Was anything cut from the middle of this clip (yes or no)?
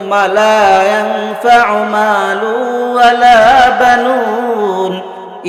no